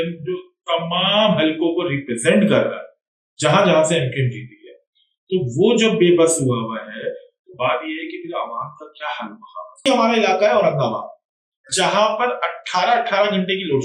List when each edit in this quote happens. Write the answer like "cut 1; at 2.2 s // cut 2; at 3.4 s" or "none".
cut 1; at 9.9 s